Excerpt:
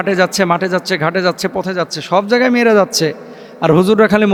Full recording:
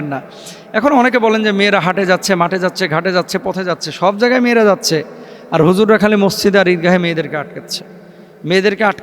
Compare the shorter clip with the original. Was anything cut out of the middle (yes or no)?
no